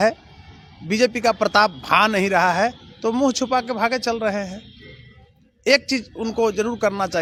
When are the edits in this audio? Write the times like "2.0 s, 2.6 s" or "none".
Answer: none